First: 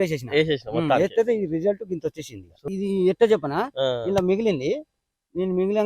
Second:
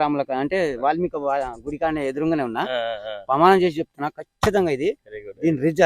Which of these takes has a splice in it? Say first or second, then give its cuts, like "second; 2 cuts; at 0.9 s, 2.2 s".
first; 1 cut; at 2.6 s